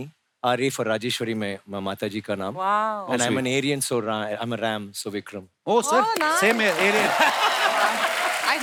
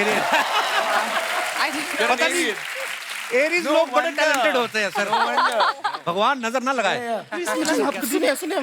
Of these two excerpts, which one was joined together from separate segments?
second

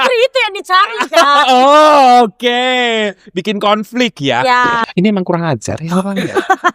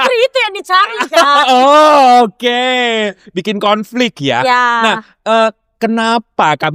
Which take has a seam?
first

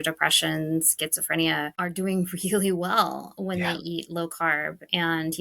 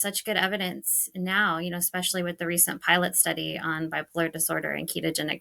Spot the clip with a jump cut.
first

